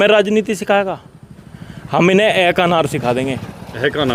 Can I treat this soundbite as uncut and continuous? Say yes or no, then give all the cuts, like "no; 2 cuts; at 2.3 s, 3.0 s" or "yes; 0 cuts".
yes; 0 cuts